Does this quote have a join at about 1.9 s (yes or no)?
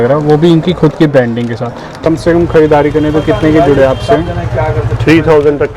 yes